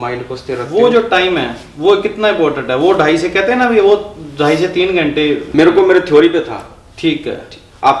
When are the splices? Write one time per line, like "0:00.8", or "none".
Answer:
0:05.4